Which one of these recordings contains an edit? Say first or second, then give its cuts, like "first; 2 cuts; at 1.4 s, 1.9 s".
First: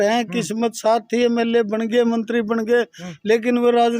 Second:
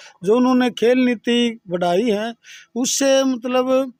first; 1 cut; at 3.0 s